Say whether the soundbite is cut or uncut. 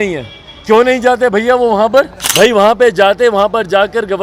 cut